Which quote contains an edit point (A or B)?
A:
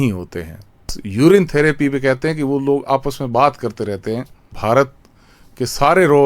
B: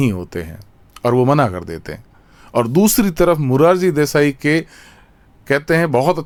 A